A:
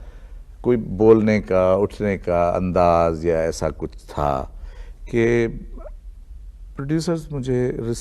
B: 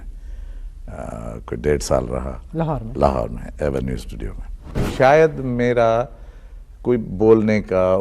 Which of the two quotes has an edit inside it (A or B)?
B